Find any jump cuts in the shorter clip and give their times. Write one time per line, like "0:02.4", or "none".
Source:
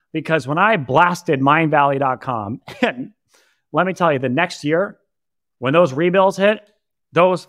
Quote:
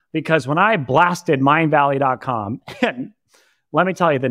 none